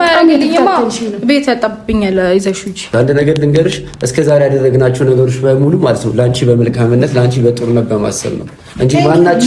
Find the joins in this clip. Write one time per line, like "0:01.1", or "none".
0:02.9